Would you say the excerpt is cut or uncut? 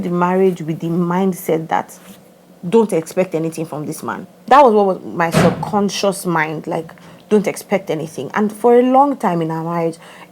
cut